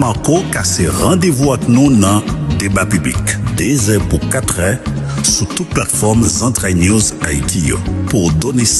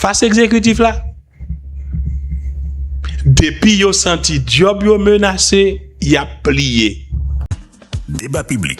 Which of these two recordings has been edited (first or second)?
second